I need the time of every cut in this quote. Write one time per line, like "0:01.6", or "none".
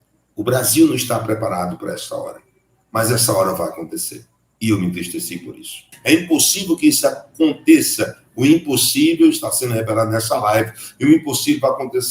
0:05.9